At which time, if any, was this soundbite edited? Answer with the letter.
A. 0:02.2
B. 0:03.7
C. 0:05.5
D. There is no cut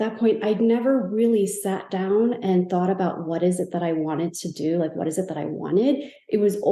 D